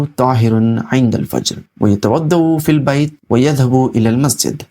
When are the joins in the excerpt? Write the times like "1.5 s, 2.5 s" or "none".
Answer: 1.6 s, 3.2 s